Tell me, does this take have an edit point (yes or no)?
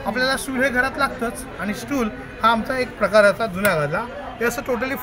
no